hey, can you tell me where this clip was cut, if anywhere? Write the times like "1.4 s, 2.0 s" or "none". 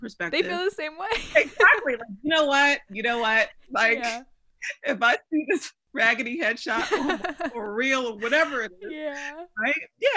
5.8 s, 7.5 s